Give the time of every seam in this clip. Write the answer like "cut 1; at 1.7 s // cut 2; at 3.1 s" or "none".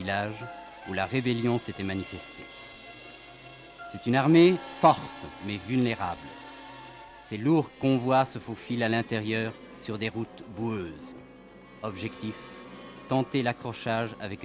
none